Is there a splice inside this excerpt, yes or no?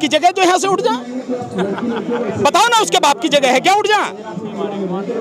no